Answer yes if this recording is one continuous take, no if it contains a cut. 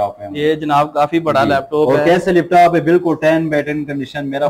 yes